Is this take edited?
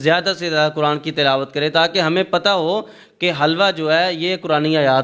no; 0 cuts

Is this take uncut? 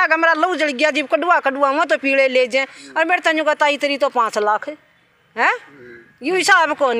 yes; 0 cuts

